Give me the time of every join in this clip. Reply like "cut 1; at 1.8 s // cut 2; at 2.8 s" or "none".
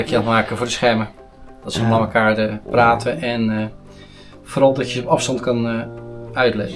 none